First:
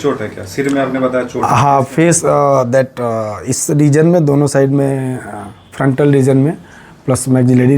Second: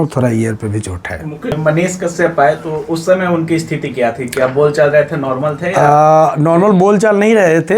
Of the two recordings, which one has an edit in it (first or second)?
second